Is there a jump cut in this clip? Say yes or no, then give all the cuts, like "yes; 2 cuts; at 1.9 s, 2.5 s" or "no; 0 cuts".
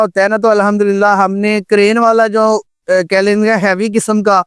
no; 0 cuts